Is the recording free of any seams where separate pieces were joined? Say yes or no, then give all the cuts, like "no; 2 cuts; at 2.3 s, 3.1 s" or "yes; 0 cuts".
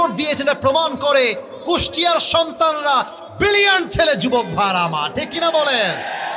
yes; 0 cuts